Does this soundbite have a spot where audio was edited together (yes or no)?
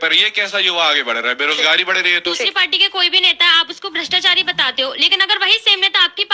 yes